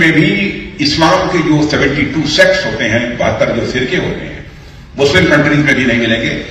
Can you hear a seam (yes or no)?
no